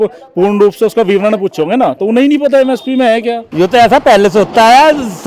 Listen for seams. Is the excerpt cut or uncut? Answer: cut